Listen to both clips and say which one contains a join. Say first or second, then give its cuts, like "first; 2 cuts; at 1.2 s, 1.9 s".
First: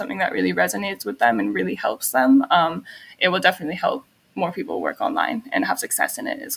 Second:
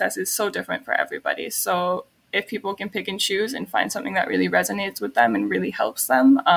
second; 1 cut; at 2.2 s